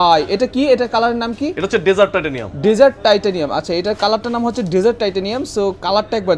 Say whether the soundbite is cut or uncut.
uncut